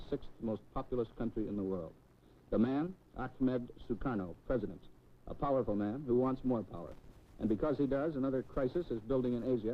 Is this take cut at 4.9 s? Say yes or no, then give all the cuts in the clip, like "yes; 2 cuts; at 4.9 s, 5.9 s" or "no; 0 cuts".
no; 1 cut; at 2.1 s